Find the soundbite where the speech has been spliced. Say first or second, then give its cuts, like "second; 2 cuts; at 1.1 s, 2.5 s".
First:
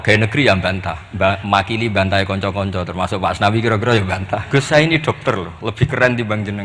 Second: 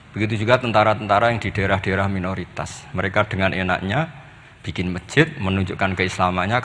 first; 2 cuts; at 1.0 s, 4.4 s